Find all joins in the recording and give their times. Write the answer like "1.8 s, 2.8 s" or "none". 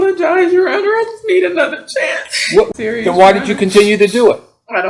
2.7 s